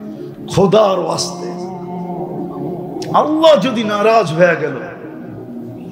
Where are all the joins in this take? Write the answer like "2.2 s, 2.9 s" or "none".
1.2 s, 3.1 s